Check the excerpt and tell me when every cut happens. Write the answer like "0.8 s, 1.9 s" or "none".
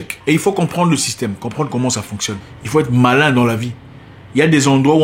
2.5 s